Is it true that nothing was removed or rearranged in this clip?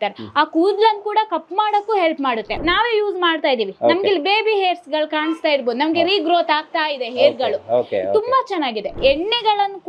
no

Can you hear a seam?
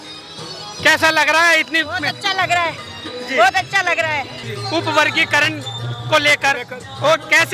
yes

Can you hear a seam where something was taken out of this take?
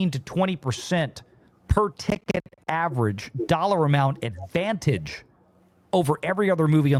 no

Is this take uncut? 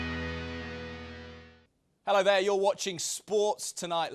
no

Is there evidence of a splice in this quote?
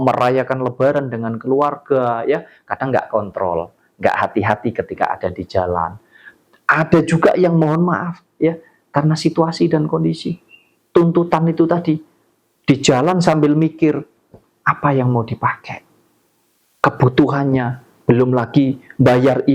no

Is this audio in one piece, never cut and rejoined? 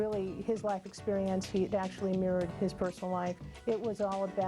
no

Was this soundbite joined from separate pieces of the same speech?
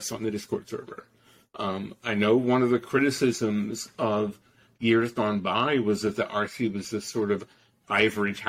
no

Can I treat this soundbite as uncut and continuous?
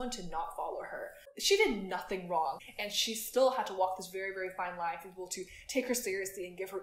no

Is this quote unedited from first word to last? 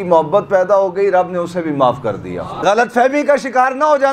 no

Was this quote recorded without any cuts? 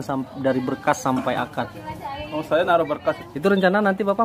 no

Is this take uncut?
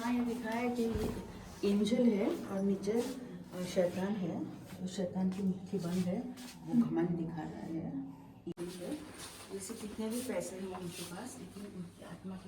no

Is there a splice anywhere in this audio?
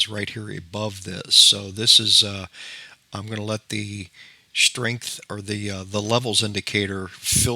no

